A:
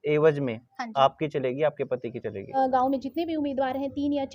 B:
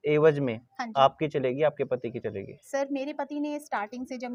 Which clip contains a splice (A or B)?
A